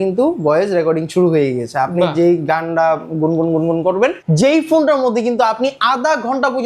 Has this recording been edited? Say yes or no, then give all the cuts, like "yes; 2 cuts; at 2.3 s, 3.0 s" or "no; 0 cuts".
yes; 1 cut; at 4.2 s